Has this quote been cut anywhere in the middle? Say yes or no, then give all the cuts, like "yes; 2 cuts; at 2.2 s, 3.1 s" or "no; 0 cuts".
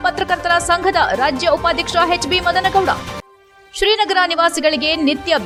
no; 0 cuts